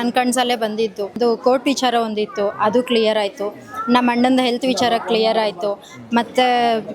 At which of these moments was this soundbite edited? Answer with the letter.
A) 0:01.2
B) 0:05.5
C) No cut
A